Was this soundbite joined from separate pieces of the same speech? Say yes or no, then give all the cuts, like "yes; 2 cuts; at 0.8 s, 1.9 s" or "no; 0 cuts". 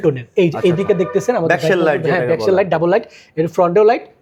no; 0 cuts